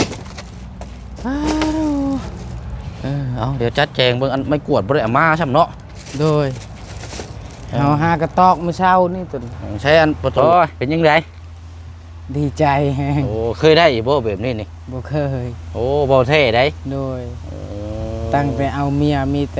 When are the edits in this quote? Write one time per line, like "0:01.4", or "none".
0:10.3